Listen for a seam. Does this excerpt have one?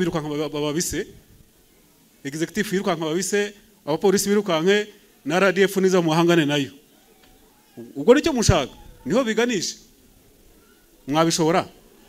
no; 0 cuts

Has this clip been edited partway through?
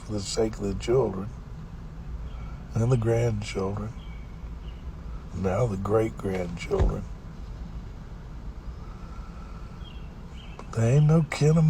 no; 0 cuts

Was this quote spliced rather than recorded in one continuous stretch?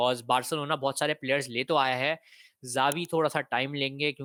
no; 0 cuts

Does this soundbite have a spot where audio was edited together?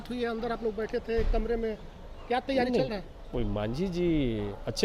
no; 0 cuts

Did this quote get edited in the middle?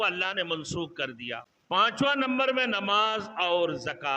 yes; 1 cut; at 1.5 s

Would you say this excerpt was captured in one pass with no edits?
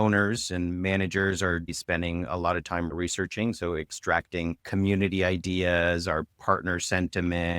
no; 1 cut; at 1.7 s

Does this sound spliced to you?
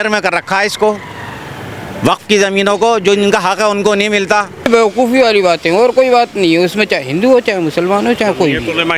yes; 1 cut; at 4.7 s

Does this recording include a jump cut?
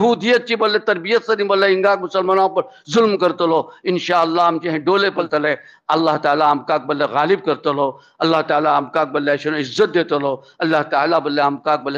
no; 0 cuts

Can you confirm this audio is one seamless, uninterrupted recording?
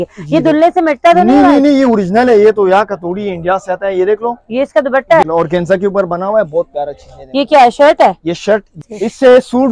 no; 2 cuts; at 5.2 s, 8.8 s

